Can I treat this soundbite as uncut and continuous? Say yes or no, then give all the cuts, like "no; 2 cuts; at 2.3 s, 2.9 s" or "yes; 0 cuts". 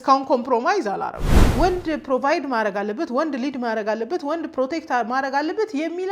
no; 1 cut; at 1.4 s